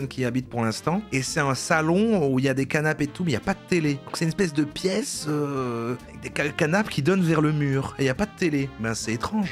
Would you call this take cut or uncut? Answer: uncut